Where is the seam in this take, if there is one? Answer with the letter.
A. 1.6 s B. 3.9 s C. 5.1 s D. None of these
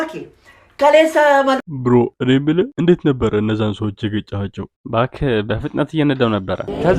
A